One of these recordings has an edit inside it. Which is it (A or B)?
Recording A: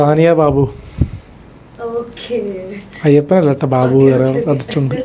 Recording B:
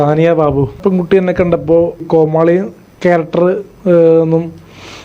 B